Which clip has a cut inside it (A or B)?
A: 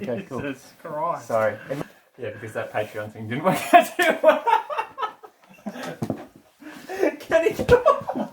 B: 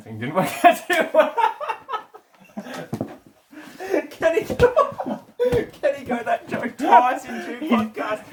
A